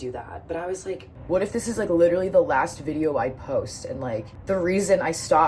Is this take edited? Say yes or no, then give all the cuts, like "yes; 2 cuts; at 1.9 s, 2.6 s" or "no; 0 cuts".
yes; 2 cuts; at 1.1 s, 4.3 s